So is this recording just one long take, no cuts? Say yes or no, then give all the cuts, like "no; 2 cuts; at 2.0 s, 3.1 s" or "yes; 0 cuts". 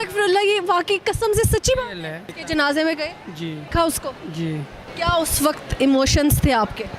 no; 3 cuts; at 2.4 s, 3.6 s, 4.8 s